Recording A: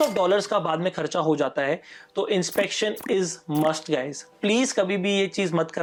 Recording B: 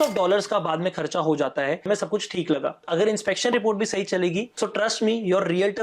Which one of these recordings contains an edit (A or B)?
B